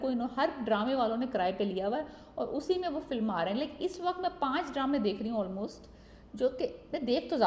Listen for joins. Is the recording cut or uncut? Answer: uncut